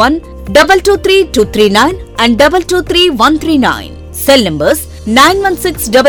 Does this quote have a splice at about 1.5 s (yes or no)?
no